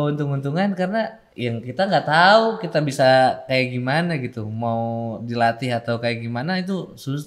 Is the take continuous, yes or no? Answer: no